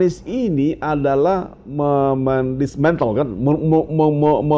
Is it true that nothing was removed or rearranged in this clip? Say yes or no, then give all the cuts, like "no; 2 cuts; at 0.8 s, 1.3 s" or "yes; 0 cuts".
yes; 0 cuts